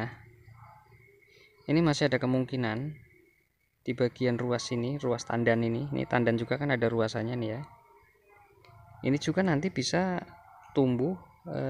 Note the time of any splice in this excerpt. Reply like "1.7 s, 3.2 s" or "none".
none